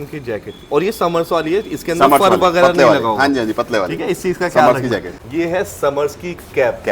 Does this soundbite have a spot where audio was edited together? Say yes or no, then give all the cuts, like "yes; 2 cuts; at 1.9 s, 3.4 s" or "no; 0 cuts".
yes; 1 cut; at 5.1 s